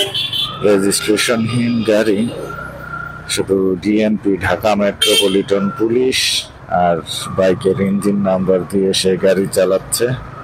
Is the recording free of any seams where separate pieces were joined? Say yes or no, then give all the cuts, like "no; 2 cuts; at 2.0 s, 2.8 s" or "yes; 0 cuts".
yes; 0 cuts